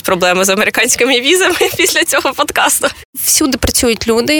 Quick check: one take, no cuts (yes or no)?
no